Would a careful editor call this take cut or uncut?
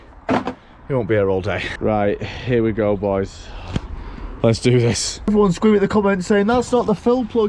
cut